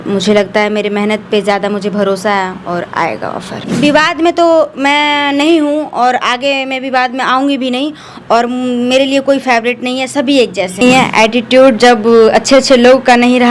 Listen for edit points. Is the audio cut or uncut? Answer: cut